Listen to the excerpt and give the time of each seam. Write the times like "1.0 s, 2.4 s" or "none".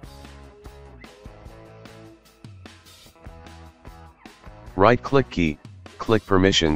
4.7 s